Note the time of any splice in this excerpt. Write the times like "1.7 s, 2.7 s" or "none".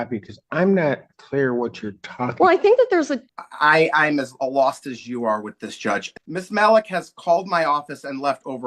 3.2 s, 6.1 s

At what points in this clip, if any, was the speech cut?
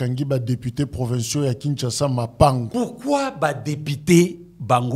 2.7 s

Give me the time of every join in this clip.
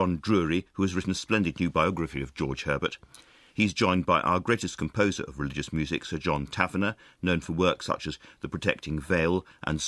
4.1 s

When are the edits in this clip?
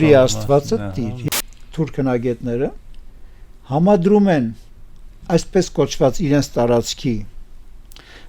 1.2 s

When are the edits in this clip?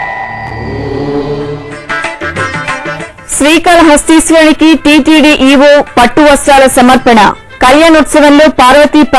3.0 s

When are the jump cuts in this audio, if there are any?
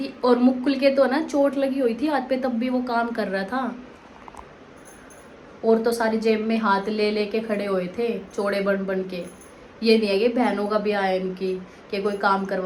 none

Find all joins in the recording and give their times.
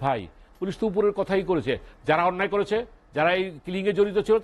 none

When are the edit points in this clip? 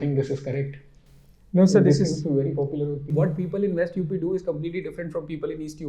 3.1 s

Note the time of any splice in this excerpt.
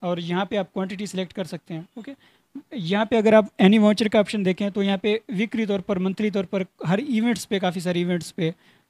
none

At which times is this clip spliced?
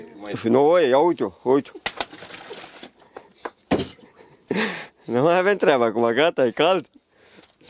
none

